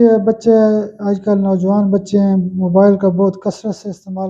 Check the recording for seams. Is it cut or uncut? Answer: uncut